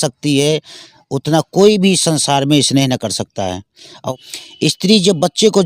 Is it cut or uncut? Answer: cut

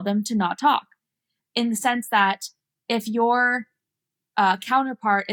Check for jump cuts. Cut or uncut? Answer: uncut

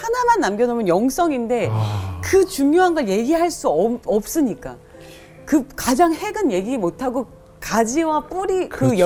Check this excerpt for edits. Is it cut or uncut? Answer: uncut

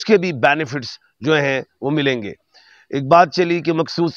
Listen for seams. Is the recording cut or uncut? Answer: uncut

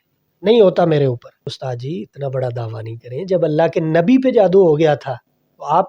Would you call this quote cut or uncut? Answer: cut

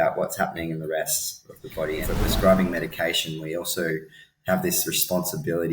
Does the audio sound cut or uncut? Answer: cut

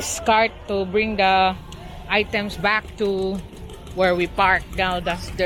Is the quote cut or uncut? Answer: uncut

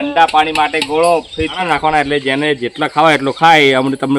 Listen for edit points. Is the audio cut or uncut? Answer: cut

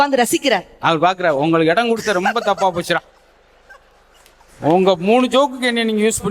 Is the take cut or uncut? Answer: uncut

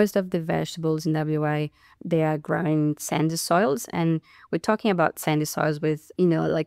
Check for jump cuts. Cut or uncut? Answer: uncut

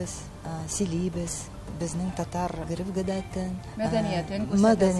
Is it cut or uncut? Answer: cut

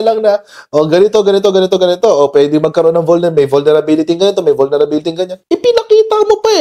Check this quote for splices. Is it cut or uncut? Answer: uncut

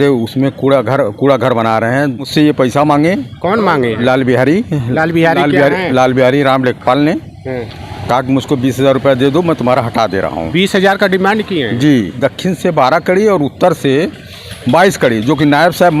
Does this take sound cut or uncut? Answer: cut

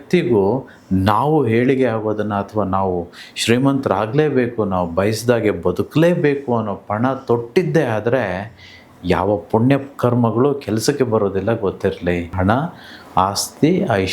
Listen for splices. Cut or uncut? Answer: cut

